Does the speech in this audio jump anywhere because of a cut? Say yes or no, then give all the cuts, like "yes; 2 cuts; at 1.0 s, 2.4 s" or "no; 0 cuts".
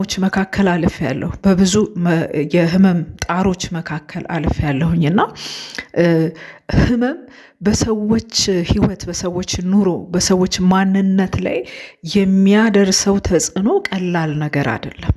no; 0 cuts